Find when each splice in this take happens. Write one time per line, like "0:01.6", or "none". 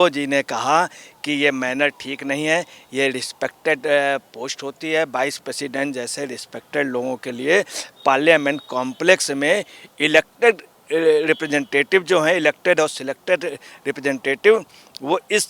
none

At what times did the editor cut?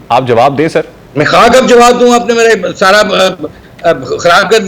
0:01.0

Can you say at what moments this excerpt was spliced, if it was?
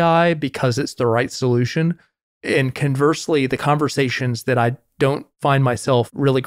none

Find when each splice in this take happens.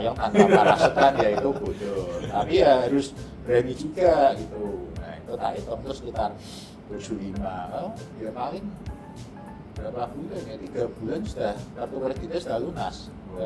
none

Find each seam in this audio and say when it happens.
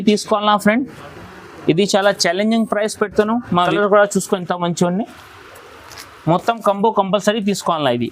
0:03.6

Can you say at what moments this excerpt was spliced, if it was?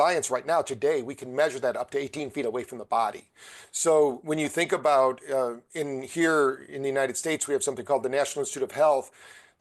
none

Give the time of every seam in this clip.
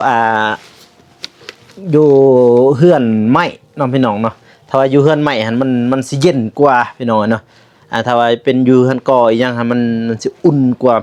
none

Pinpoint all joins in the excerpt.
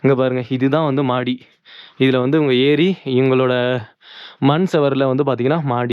none

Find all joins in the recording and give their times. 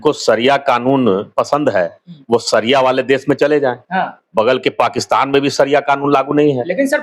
none

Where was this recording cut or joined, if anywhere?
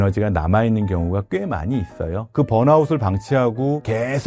0:02.3

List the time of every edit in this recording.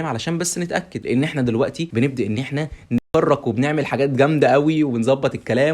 0:00.9
0:01.8

